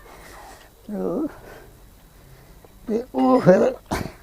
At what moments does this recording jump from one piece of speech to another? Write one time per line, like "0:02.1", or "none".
none